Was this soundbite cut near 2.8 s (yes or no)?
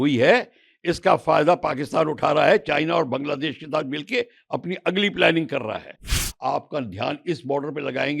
no